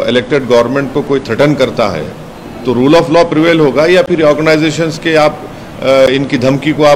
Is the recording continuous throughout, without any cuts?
yes; 0 cuts

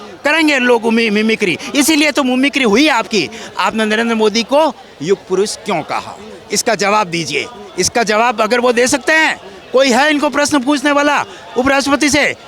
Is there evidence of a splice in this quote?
no; 0 cuts

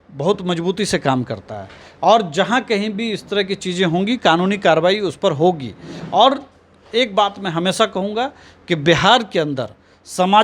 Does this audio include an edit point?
no; 0 cuts

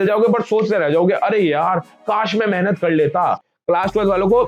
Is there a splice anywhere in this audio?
yes; 1 cut; at 3.5 s

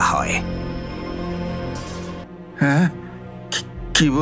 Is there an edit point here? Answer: yes; 1 cut; at 2.2 s

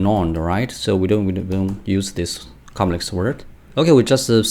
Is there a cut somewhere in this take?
yes; 1 cut; at 3.5 s

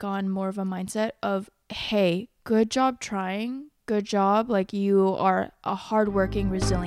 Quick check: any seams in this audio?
no; 0 cuts

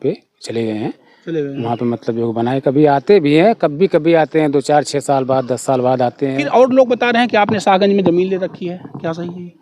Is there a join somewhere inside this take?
yes; 1 cut; at 6.4 s

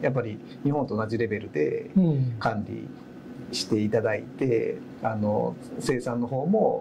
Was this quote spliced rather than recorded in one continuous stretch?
no; 0 cuts

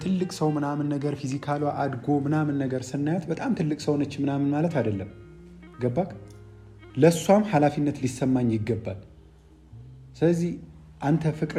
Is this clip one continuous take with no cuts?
yes; 0 cuts

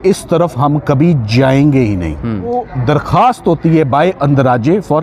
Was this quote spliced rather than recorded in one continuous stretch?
yes; 1 cut; at 2.5 s

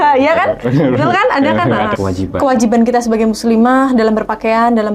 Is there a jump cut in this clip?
yes; 1 cut; at 1.9 s

